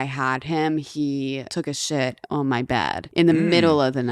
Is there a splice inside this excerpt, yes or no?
yes